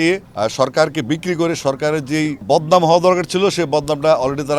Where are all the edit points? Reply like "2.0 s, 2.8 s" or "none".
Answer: 2.4 s